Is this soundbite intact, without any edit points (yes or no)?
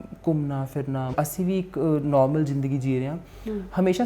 no